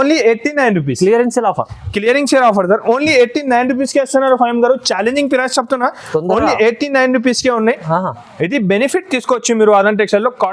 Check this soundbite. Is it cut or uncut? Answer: uncut